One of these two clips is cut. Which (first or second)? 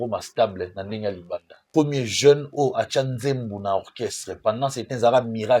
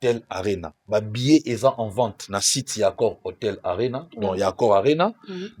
first